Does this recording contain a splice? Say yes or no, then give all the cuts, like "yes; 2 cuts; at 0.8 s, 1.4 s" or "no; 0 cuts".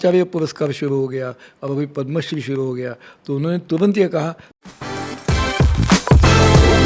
yes; 1 cut; at 4.5 s